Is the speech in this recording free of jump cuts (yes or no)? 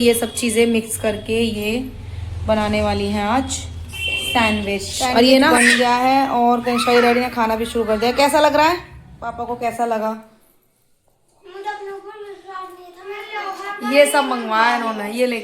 no